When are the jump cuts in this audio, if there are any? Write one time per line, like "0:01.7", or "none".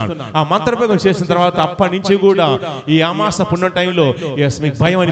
none